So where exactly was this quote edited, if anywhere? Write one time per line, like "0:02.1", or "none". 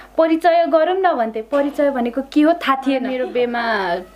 0:03.1